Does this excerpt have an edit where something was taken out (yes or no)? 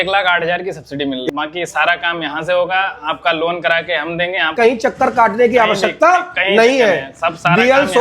yes